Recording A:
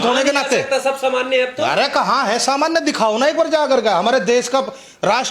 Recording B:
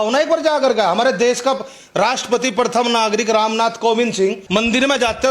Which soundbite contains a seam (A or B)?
B